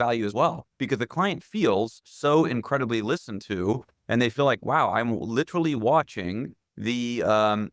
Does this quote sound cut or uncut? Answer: uncut